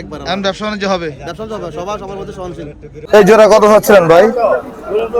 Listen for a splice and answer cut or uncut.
cut